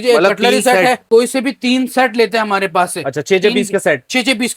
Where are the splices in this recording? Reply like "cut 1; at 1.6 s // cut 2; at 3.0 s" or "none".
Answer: cut 1; at 1.0 s